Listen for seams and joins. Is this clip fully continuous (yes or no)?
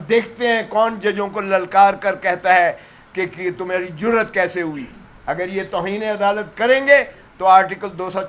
yes